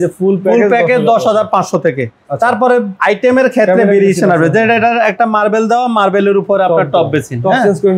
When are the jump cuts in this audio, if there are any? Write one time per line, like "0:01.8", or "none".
0:02.9